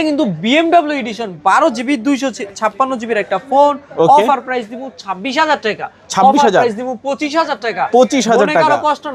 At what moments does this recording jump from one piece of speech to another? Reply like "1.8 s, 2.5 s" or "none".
none